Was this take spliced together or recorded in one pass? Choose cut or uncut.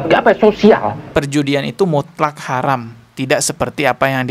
cut